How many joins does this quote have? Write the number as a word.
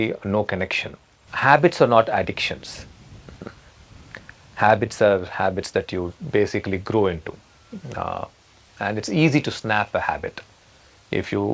one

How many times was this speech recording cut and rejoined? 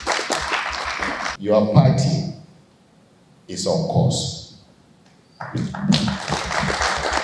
one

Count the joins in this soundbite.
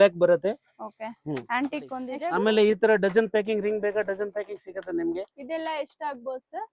one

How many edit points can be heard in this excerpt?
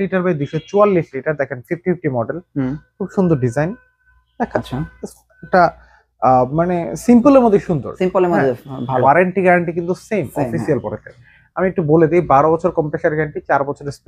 one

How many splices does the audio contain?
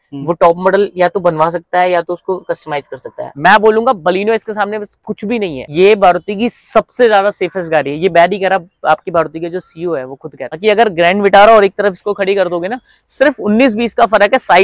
three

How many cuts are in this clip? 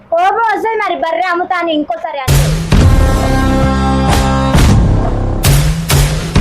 one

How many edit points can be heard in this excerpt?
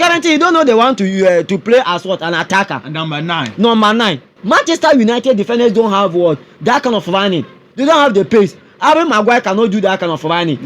one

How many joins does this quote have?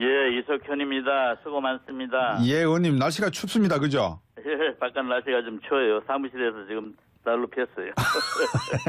one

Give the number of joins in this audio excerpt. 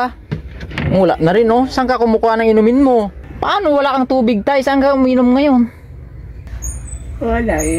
one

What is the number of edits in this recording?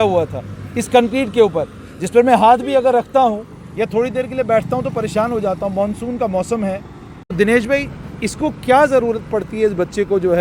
one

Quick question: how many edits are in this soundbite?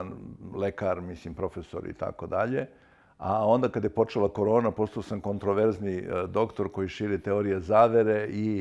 zero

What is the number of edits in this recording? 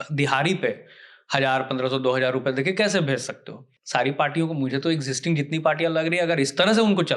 one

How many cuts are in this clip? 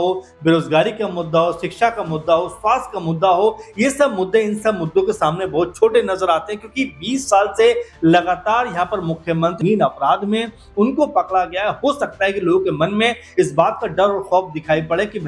one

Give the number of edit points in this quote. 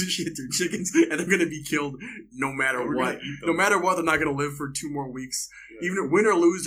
zero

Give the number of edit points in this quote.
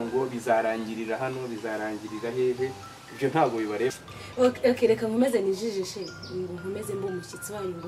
one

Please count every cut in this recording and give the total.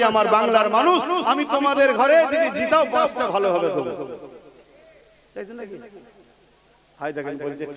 zero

